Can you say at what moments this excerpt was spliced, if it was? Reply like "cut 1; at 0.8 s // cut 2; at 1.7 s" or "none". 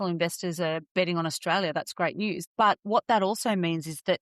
cut 1; at 0.9 s // cut 2; at 2.4 s